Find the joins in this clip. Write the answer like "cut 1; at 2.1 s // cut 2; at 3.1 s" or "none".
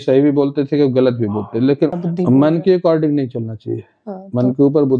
cut 1; at 1.9 s